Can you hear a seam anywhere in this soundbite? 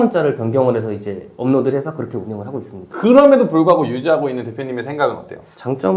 yes; 1 cut; at 2.9 s

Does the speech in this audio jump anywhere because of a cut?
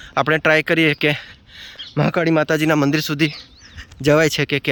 no; 0 cuts

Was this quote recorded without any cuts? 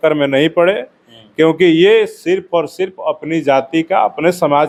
yes; 0 cuts

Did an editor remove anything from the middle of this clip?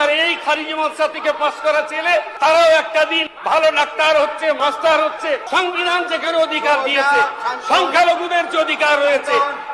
yes; 4 cuts; at 2.3 s, 3.3 s, 4.6 s, 5.4 s

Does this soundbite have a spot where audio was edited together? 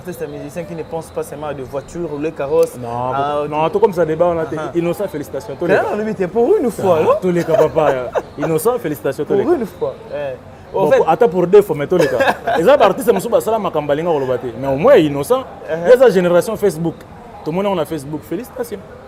no; 0 cuts

